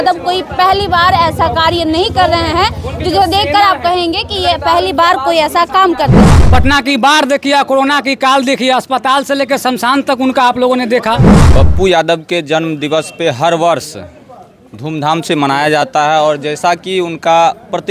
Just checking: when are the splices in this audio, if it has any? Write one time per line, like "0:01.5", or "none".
0:06.3
0:11.4